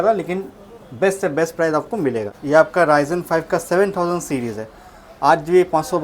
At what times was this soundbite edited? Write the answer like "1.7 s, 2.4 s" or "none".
2.3 s

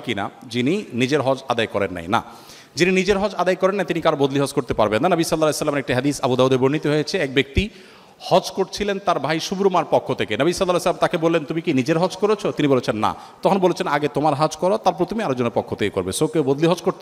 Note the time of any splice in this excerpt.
none

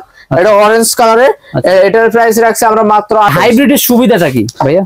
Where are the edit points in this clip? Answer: 3.3 s

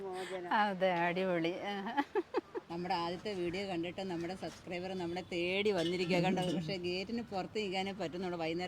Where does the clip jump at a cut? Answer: 2.6 s

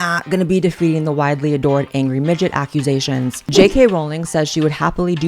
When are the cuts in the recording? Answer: 3.4 s

